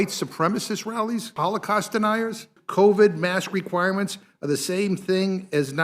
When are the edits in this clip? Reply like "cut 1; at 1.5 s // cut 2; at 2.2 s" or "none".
cut 1; at 1.3 s // cut 2; at 2.6 s